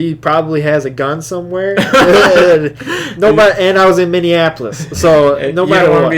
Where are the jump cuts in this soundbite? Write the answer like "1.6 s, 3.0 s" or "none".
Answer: none